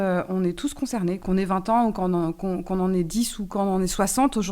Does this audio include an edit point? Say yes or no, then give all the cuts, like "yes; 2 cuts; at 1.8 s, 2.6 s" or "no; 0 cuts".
yes; 1 cut; at 1.2 s